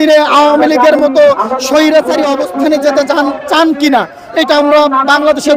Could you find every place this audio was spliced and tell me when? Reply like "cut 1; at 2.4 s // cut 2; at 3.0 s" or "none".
none